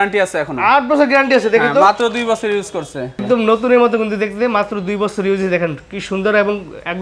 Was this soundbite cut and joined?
yes; 1 cut; at 3.1 s

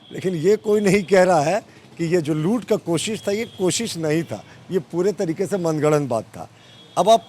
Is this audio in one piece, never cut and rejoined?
yes; 0 cuts

